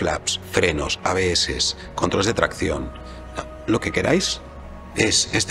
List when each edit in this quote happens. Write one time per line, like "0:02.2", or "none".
0:04.4